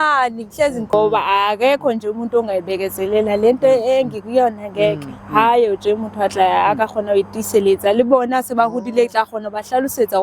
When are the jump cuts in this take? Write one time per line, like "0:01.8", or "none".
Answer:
0:00.9